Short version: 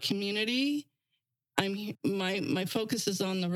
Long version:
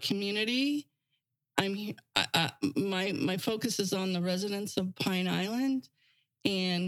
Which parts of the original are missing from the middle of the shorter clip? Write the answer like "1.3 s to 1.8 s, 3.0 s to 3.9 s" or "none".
2.0 s to 2.7 s